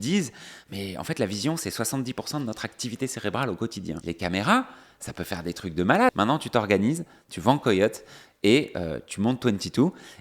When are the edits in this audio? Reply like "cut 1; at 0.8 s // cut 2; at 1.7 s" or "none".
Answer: cut 1; at 4.0 s // cut 2; at 6.1 s